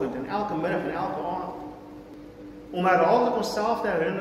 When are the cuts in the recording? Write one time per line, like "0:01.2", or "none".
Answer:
0:02.1